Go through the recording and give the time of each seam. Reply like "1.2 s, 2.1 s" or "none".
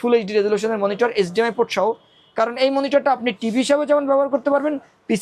none

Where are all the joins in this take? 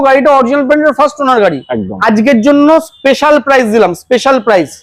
none

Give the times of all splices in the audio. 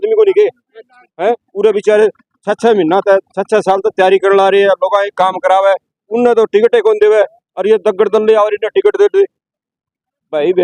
none

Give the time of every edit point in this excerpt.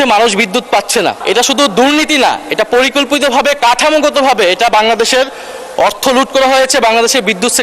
1.2 s

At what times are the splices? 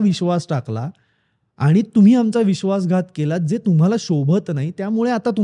none

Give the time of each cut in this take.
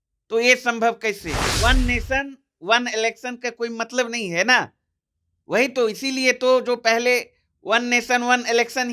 1.5 s

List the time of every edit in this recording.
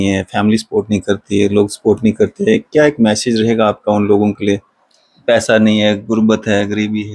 none

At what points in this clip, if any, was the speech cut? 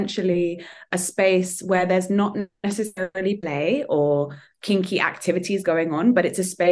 none

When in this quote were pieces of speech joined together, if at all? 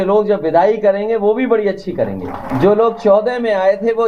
2.4 s

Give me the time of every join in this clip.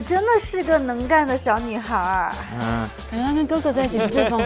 3.0 s

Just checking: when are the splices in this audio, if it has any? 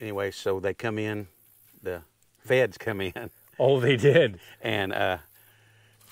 none

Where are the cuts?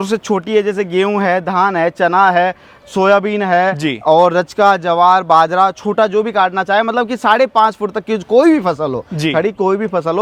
none

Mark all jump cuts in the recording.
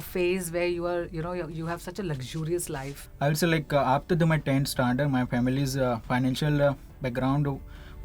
3.0 s

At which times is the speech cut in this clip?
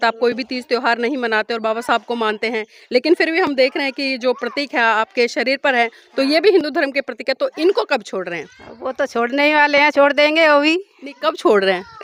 none

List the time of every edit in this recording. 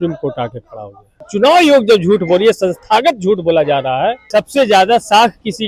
1.2 s, 4.2 s

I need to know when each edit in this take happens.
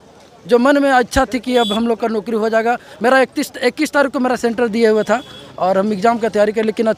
none

